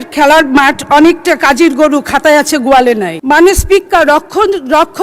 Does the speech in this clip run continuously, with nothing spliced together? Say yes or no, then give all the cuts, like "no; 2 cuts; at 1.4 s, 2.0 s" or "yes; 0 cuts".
no; 1 cut; at 3.1 s